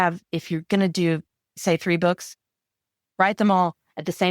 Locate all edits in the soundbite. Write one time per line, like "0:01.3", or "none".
0:01.6